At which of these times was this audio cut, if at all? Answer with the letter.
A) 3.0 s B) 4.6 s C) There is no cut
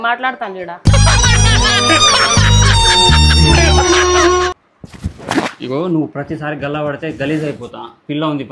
B